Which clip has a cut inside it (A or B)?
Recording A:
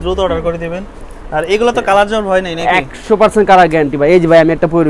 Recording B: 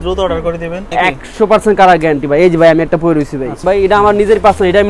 B